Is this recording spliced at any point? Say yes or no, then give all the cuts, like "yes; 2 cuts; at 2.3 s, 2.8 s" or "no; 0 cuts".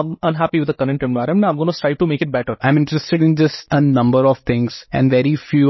yes; 3 cuts; at 2.5 s, 3.6 s, 4.8 s